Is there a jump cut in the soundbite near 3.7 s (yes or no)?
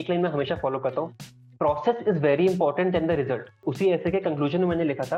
yes